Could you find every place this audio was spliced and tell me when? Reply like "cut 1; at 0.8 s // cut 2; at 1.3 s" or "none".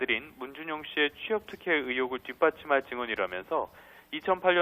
cut 1; at 2.0 s